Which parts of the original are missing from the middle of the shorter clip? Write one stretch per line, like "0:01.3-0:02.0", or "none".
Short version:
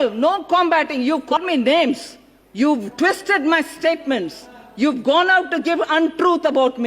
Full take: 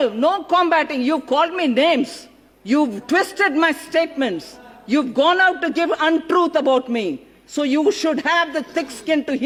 0:01.4-0:01.5